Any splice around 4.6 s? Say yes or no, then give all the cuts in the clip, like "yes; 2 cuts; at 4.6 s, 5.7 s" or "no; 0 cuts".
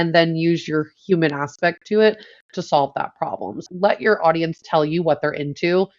yes; 2 cuts; at 3.5 s, 4.6 s